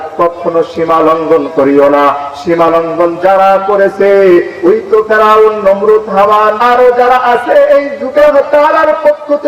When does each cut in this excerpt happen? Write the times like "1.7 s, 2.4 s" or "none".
6.6 s, 8.2 s